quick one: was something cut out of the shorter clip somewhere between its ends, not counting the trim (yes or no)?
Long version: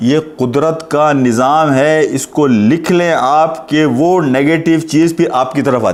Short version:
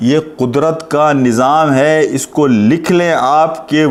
no